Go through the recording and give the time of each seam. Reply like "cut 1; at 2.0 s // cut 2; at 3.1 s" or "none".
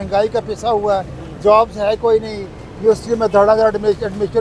none